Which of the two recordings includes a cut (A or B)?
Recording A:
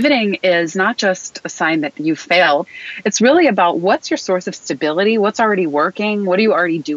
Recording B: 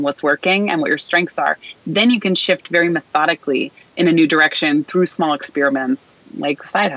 A